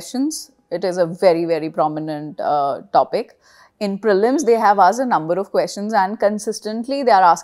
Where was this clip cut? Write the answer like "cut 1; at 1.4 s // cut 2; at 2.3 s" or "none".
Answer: none